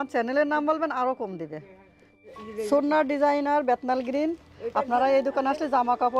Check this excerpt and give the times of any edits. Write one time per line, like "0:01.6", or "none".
0:02.3